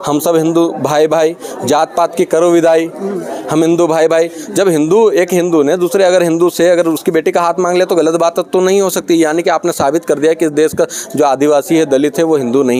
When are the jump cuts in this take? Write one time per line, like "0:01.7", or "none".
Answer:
none